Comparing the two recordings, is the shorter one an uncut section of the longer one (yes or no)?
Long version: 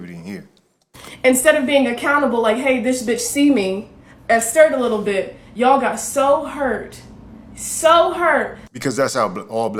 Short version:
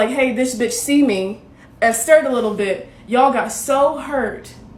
yes